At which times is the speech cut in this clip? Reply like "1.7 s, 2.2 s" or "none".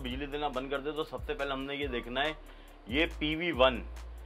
none